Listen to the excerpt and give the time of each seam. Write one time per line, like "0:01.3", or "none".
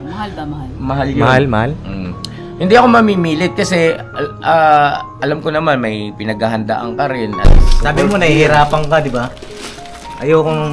0:07.4